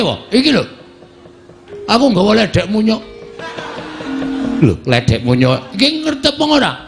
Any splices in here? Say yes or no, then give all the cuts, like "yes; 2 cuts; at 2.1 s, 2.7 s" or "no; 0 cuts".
no; 0 cuts